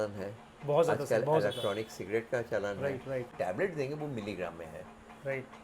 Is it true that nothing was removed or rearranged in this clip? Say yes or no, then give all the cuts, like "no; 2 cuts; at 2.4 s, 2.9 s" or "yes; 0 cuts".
no; 1 cut; at 3.3 s